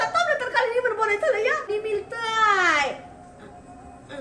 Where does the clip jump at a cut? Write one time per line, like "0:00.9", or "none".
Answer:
0:01.7